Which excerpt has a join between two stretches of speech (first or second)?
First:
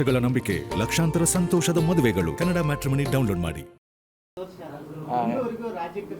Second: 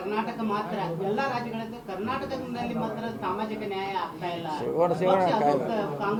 first